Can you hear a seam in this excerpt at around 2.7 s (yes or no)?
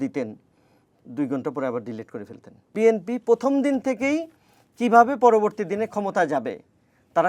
yes